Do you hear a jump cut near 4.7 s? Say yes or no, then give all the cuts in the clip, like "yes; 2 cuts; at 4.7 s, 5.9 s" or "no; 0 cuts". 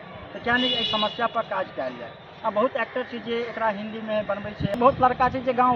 yes; 1 cut; at 4.7 s